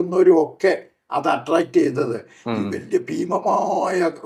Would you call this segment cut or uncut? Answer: uncut